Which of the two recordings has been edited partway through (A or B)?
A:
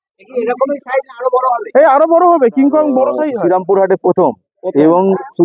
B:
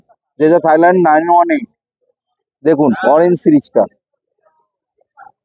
A